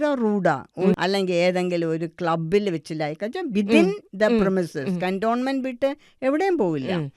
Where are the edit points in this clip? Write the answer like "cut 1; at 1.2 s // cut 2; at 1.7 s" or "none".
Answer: cut 1; at 0.9 s